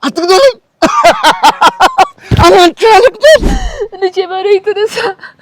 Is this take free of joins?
no; 1 cut; at 3.6 s

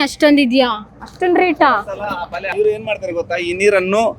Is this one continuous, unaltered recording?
no; 1 cut; at 2.6 s

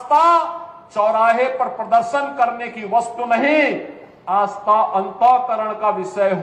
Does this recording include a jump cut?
no; 0 cuts

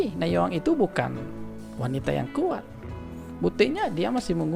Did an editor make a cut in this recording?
no; 0 cuts

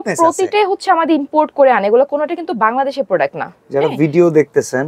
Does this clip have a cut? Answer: no; 0 cuts

